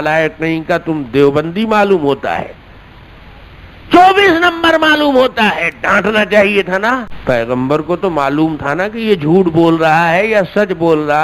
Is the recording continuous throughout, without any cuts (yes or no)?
no